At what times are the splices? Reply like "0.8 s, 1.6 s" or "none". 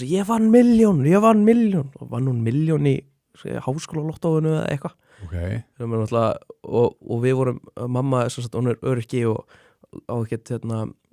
none